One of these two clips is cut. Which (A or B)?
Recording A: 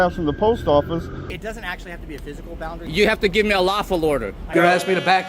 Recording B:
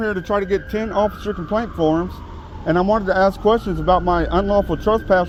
A